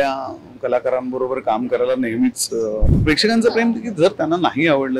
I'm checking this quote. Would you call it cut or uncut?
cut